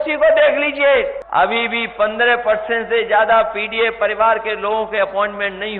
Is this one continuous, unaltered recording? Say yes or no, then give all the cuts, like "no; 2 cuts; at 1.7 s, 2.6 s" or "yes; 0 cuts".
no; 1 cut; at 1.2 s